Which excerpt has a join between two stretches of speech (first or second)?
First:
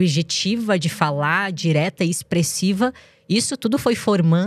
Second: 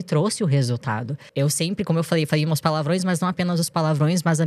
second